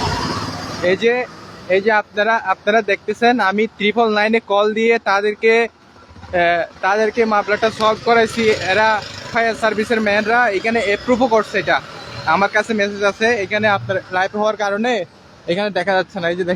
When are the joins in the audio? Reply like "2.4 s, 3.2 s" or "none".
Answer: none